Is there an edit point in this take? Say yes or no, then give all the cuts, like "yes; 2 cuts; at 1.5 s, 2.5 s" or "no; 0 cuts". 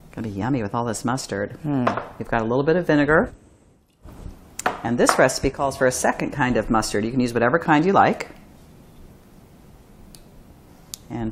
yes; 1 cut; at 6.7 s